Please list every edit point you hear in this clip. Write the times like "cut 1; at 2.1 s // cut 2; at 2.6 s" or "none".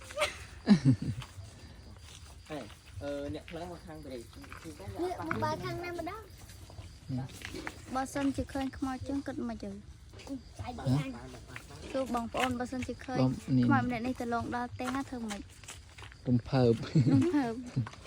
none